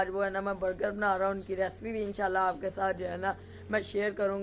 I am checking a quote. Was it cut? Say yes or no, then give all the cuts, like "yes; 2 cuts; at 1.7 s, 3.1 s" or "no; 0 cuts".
no; 0 cuts